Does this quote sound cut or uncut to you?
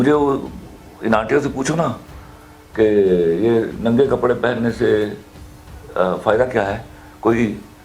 uncut